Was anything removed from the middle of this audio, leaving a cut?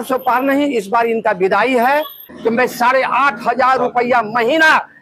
yes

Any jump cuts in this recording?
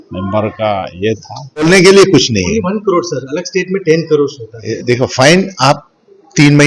yes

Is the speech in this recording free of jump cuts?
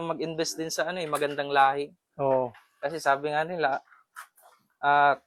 yes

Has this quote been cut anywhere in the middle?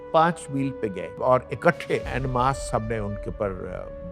yes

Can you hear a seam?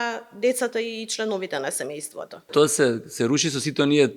yes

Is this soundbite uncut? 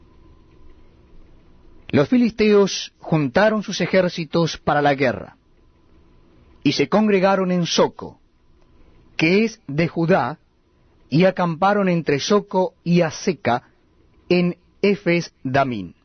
yes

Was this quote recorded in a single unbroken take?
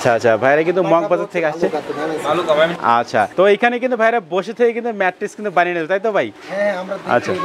no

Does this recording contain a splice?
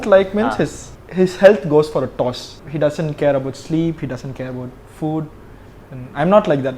no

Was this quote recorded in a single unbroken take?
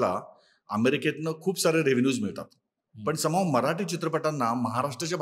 yes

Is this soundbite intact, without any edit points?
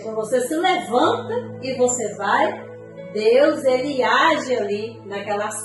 yes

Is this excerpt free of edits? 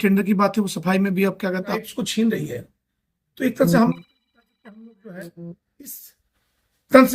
no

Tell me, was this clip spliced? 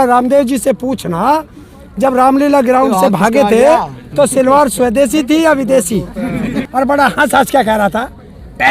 yes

